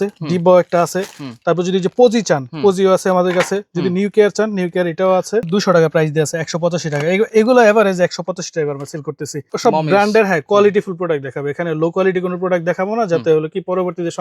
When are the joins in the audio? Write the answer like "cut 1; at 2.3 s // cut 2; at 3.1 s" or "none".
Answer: cut 1; at 5.5 s // cut 2; at 9.4 s